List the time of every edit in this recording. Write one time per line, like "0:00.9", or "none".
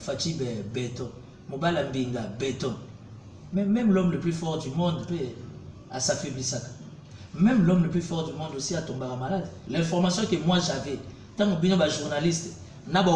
0:09.6